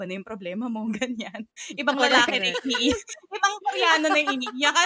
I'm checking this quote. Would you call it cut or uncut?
uncut